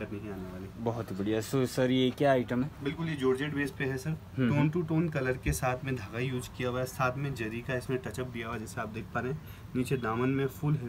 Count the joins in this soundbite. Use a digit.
0